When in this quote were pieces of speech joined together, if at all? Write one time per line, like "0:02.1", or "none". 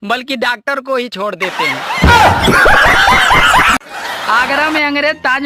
0:03.9